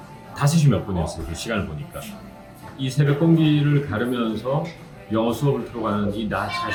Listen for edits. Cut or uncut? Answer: uncut